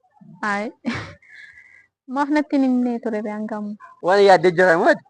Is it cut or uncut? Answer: cut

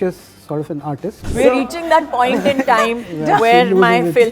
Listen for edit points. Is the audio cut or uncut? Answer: cut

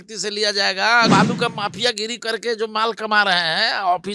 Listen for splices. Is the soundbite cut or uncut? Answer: cut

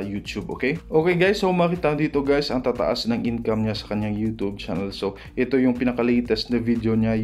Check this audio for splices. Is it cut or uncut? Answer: uncut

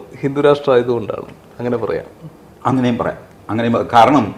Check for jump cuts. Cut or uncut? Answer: uncut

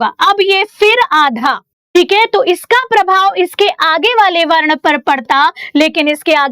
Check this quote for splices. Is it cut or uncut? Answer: cut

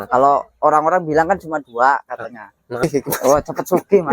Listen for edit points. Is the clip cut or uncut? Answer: cut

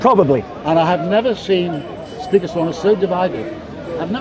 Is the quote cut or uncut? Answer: uncut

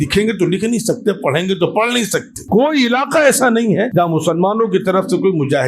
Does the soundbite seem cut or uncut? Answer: cut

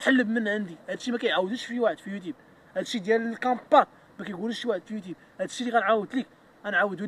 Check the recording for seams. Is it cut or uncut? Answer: uncut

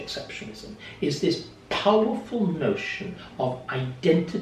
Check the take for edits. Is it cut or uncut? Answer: uncut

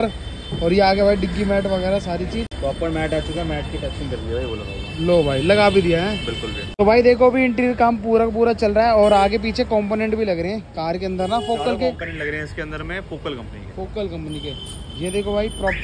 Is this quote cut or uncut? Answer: uncut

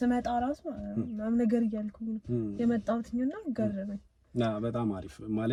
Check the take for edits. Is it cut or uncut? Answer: uncut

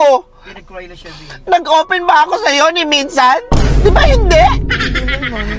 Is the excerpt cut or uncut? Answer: uncut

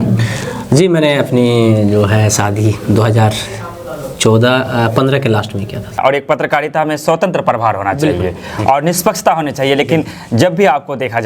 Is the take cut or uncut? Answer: cut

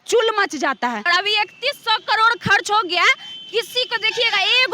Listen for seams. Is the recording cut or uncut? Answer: cut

